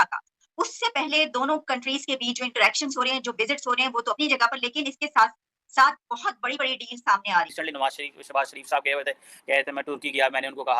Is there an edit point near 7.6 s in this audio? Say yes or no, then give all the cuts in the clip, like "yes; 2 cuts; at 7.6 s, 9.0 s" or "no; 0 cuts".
yes; 1 cut; at 7.6 s